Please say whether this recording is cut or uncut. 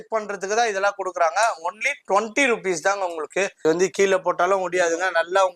cut